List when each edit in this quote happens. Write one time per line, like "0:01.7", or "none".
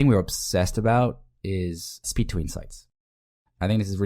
0:02.1